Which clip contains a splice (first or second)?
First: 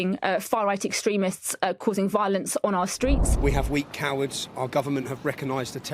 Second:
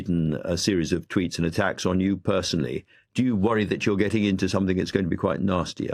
first